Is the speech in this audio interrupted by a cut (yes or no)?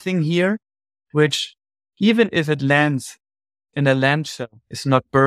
no